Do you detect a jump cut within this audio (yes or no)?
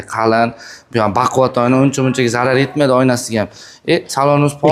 no